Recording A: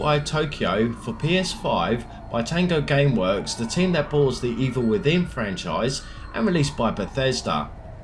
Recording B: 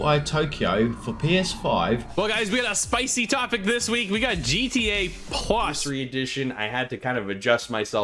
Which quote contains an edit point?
B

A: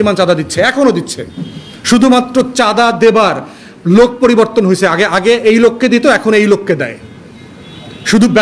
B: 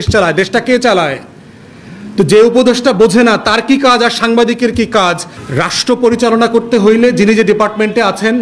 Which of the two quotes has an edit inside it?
B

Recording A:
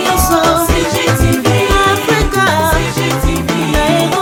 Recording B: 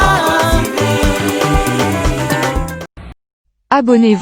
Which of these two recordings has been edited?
B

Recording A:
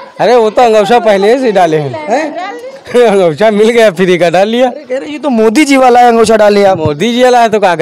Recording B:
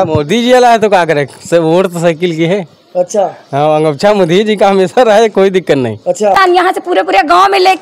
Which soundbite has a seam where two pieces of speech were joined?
B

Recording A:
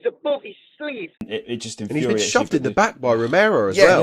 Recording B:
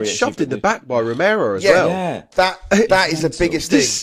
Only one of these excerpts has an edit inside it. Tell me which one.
A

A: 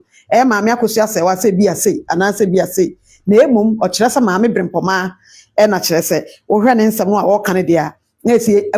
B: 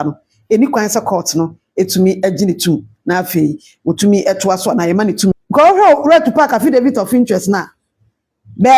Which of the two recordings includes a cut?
B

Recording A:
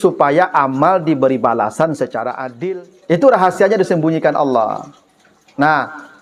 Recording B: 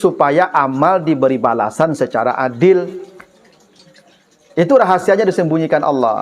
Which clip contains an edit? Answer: A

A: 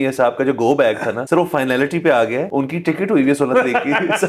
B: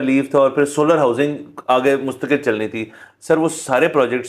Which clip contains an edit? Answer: A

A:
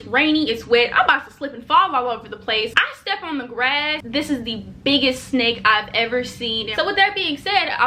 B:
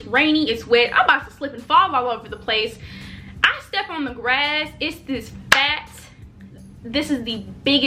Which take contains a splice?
A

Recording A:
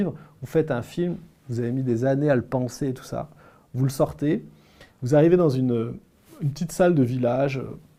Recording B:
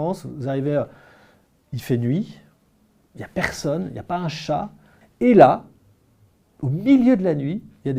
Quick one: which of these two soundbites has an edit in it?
B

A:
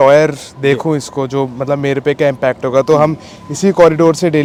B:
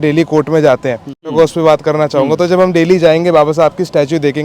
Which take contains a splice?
B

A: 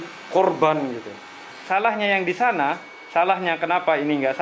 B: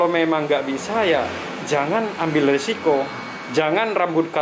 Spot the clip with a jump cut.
A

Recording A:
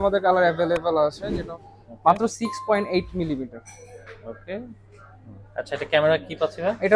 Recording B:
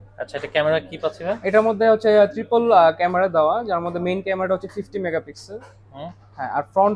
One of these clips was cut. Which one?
A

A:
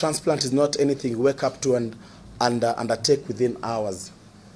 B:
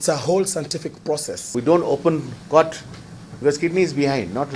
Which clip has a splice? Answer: B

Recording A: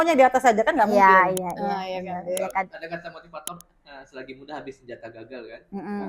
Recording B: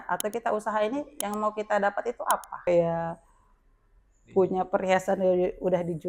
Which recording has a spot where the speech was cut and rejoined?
B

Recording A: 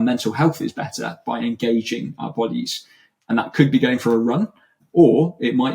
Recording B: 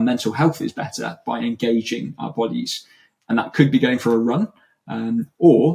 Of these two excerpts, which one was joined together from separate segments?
A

